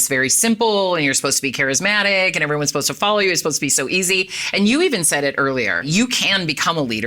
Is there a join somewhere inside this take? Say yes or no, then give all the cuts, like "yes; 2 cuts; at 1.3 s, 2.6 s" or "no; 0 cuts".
no; 0 cuts